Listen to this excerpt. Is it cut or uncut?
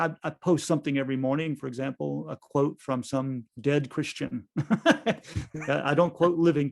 cut